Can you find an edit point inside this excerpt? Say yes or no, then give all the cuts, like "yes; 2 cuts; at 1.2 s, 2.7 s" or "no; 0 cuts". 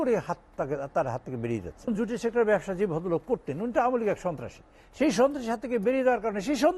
yes; 1 cut; at 1.9 s